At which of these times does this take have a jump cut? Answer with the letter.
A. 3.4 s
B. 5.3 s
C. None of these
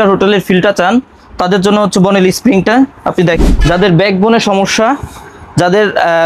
A